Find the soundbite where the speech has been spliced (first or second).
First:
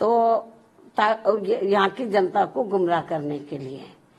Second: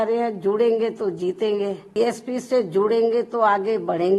second